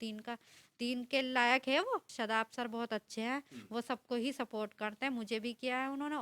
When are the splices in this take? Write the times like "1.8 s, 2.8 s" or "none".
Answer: 2.1 s